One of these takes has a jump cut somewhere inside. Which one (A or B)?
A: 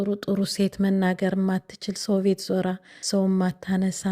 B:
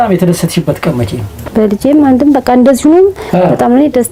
A